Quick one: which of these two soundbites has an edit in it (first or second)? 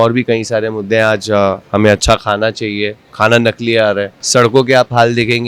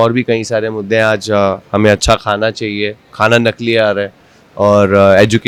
first